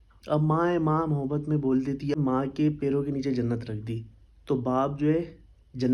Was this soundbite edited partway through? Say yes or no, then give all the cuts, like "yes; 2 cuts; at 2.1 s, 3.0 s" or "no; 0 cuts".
yes; 1 cut; at 2.2 s